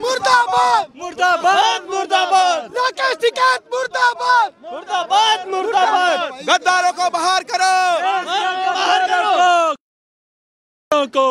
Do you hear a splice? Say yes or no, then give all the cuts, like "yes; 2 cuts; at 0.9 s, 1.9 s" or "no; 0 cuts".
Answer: no; 0 cuts